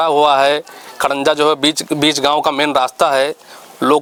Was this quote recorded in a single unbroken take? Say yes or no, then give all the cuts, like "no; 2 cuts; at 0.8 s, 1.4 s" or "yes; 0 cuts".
yes; 0 cuts